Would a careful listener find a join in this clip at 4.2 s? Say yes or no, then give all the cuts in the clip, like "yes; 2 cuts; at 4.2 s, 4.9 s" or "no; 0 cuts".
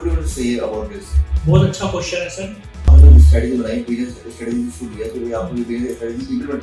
no; 1 cut; at 2.9 s